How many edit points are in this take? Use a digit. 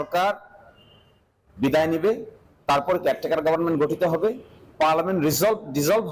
0